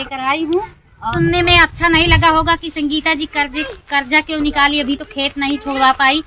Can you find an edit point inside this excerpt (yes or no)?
yes